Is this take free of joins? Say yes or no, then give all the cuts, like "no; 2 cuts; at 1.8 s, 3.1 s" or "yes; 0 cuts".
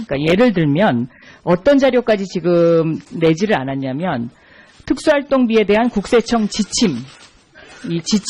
no; 1 cut; at 6.2 s